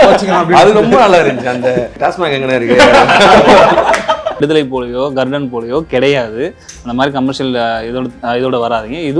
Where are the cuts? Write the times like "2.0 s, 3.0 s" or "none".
1.9 s, 4.4 s